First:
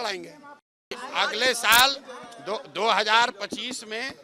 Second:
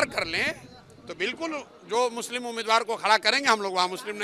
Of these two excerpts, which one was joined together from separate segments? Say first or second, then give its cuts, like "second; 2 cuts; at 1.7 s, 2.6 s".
first; 1 cut; at 1.0 s